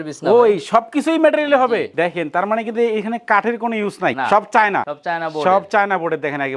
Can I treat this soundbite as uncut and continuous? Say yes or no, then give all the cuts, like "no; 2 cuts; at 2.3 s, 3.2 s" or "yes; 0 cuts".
yes; 0 cuts